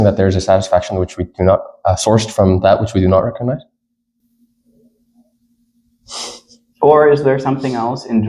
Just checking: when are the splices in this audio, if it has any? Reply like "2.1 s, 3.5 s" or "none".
4.2 s